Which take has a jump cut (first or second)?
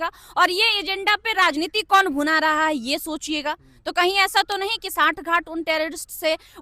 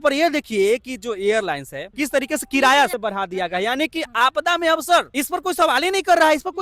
second